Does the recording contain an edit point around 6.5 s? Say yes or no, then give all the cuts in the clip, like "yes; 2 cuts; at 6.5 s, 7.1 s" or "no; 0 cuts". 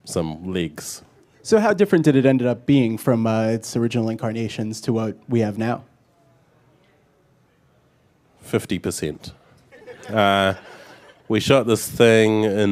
no; 0 cuts